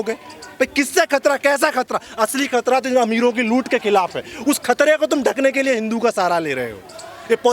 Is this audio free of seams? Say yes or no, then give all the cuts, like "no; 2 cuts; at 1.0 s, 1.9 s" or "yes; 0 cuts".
yes; 0 cuts